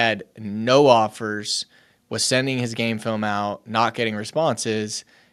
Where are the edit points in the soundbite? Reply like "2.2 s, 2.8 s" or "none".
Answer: none